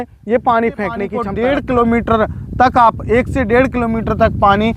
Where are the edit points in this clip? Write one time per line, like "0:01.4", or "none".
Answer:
0:01.2